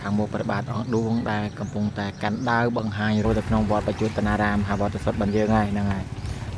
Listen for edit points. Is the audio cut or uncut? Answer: cut